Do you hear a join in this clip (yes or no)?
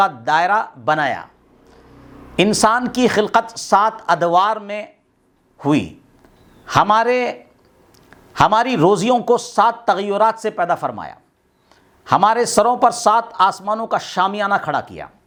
no